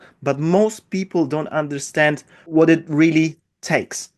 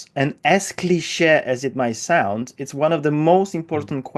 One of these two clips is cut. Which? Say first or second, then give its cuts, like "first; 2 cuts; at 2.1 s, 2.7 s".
first; 1 cut; at 2.3 s